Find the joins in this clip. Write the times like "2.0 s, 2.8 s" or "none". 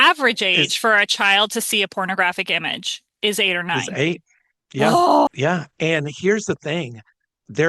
5.3 s